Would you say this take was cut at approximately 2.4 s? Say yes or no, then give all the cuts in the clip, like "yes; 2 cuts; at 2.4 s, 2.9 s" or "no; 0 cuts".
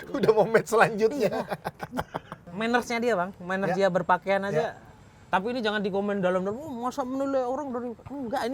yes; 1 cut; at 2.4 s